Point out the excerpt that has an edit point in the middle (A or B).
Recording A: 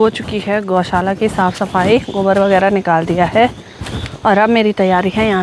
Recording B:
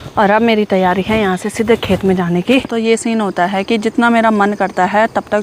B